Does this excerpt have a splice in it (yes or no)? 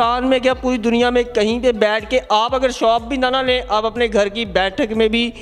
no